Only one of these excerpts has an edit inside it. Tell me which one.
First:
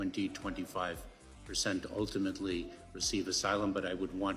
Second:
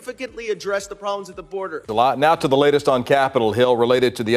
second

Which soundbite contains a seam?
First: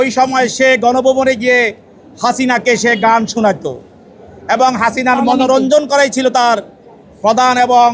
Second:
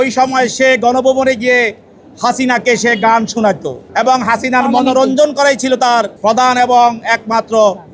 second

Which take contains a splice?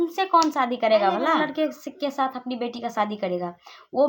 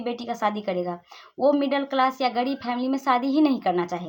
first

